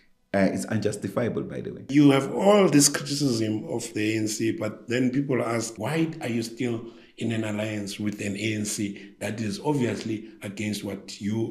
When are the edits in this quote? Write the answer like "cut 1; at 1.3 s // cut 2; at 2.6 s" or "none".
cut 1; at 1.9 s // cut 2; at 5.8 s